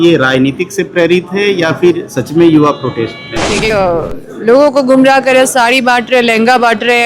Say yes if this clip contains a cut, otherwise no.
yes